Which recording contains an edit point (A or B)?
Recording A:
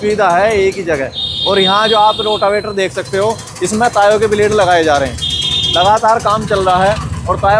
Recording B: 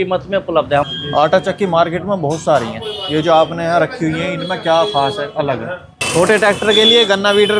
B